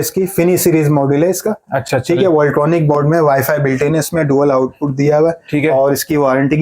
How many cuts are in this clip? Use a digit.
0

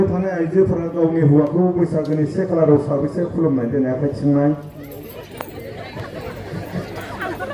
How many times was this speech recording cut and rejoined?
0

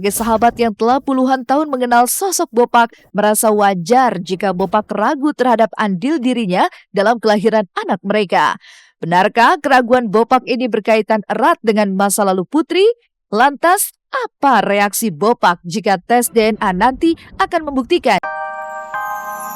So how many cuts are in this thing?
1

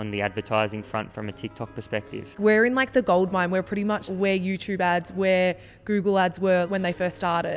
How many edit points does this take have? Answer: 3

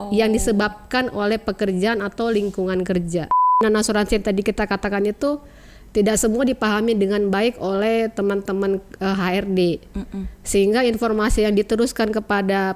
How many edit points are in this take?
1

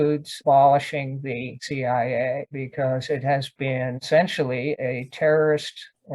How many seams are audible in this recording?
0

